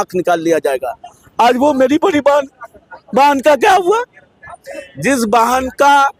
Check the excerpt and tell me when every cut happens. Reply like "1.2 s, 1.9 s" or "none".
none

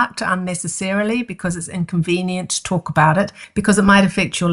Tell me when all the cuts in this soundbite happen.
3.4 s

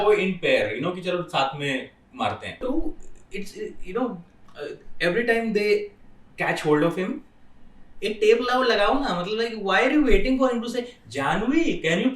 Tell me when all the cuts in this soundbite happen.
2.6 s

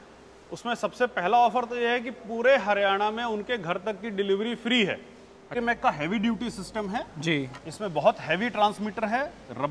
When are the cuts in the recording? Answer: 5.5 s

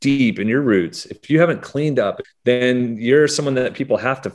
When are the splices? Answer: 2.3 s

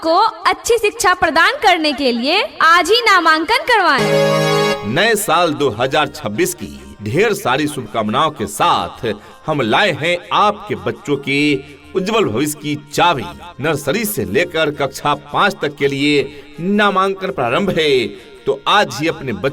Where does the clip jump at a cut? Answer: 4.8 s

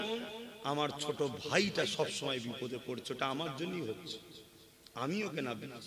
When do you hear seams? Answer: none

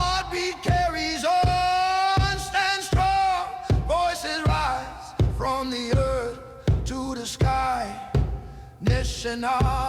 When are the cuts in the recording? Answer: none

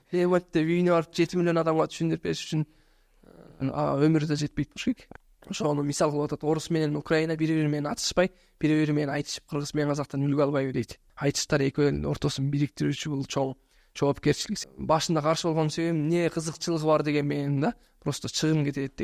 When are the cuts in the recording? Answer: 5.1 s, 11.0 s, 14.5 s

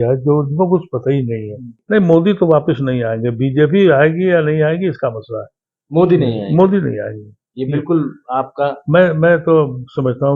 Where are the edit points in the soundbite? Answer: 1.7 s

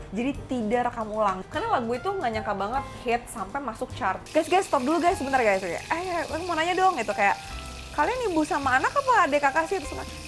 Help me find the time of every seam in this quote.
1.4 s, 4.2 s

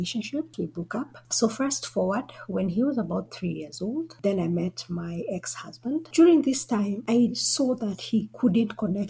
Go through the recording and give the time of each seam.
0.9 s, 6.1 s

